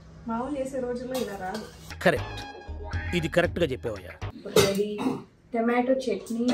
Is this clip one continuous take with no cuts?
no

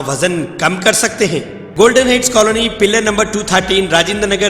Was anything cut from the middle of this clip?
yes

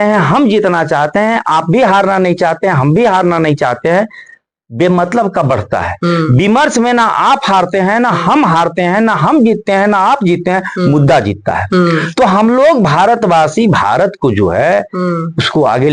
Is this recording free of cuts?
yes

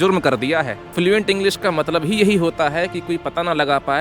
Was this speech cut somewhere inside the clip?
yes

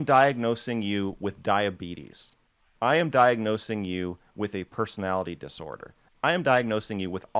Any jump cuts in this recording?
no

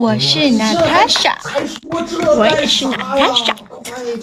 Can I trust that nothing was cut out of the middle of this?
yes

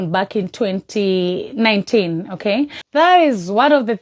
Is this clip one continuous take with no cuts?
no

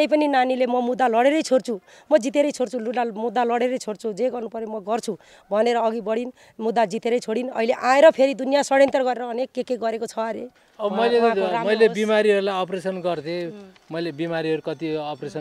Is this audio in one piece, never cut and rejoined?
no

